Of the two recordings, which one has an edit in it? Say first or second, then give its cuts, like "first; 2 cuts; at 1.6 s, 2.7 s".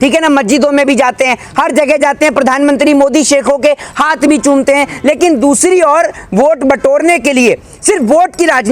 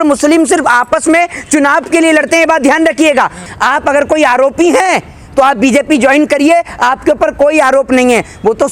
second; 1 cut; at 3.4 s